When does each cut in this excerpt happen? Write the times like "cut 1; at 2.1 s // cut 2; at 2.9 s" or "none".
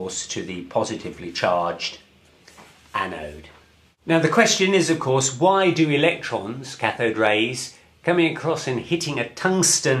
none